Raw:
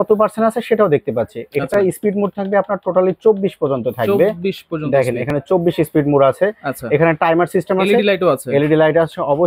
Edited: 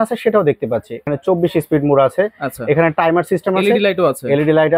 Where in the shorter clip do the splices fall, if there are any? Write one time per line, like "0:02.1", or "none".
0:01.0